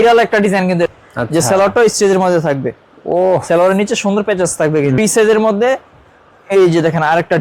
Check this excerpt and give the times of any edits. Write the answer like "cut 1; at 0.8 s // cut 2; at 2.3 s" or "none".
cut 1; at 0.9 s // cut 2; at 5.0 s

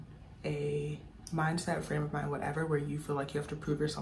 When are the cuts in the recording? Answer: none

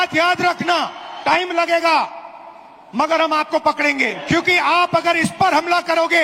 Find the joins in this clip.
cut 1; at 1.0 s // cut 2; at 4.2 s

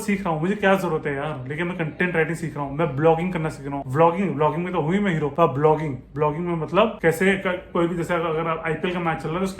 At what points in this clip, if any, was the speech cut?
none

